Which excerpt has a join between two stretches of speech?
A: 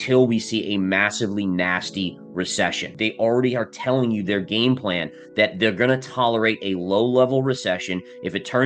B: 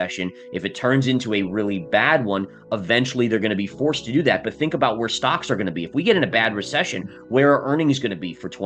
A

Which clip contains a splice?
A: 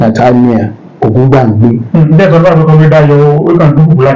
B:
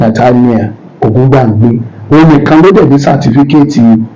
A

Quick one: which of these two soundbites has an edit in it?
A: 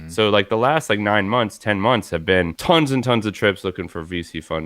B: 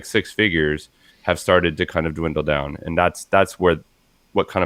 A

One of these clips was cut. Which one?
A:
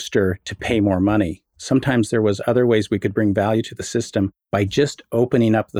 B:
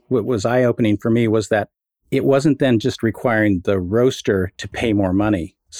A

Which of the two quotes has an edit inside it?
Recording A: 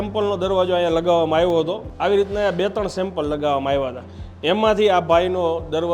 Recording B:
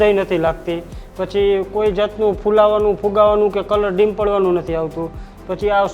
A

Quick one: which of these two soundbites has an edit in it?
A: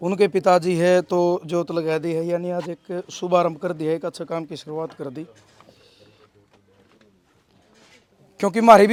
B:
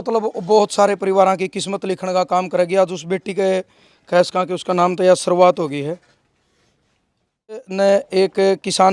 B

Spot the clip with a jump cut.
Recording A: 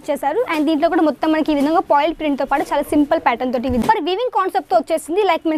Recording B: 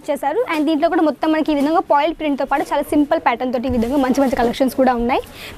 A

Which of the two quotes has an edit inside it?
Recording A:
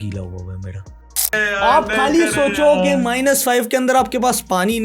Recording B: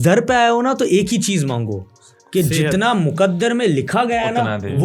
A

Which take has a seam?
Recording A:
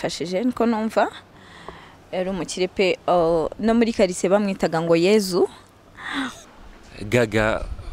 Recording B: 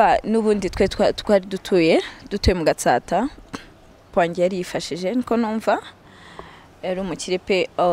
A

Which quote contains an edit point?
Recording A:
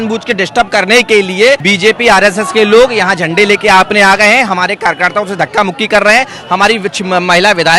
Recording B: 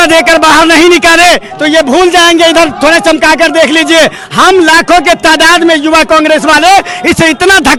A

